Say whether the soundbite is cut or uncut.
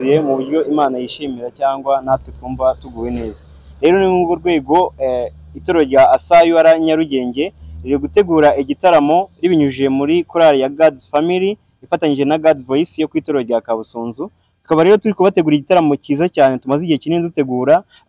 uncut